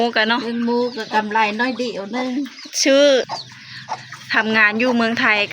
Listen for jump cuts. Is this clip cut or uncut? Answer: cut